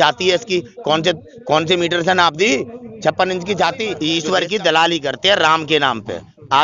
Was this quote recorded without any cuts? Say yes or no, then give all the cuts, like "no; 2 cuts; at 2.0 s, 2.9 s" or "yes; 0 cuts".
no; 1 cut; at 4.0 s